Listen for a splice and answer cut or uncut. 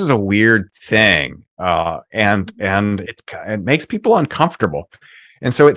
uncut